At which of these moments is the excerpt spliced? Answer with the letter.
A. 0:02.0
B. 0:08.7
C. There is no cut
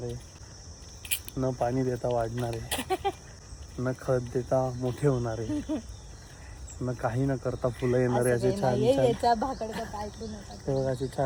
C